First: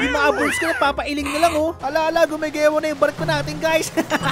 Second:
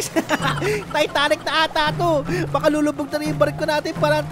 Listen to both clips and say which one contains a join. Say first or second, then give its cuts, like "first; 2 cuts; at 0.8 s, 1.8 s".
first; 1 cut; at 1.8 s